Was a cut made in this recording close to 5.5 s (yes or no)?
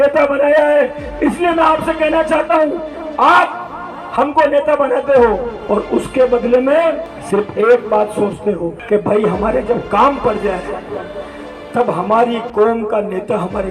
yes